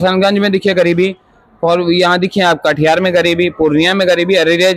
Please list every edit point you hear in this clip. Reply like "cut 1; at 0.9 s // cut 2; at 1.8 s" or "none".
none